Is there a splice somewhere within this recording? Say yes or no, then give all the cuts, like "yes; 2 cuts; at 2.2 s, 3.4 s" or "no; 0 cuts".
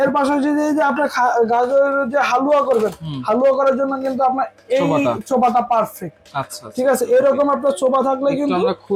no; 0 cuts